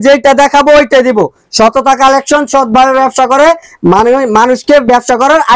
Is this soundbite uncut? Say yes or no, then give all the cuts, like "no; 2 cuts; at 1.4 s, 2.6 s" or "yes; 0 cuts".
yes; 0 cuts